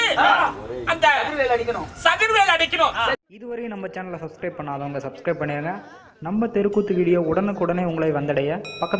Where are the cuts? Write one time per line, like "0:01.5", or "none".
0:03.2